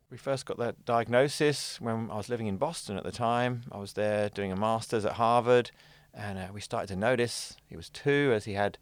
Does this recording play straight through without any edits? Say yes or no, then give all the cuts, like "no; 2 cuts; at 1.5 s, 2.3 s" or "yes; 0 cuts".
yes; 0 cuts